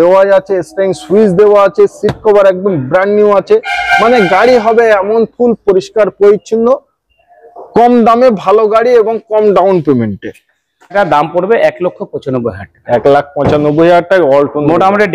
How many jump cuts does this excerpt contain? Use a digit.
1